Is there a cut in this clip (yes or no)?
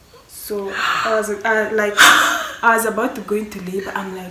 no